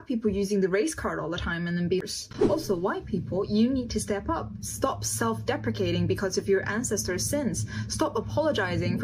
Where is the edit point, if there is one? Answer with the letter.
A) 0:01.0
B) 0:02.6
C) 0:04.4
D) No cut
D